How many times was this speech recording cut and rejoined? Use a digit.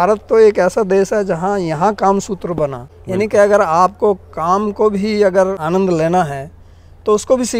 2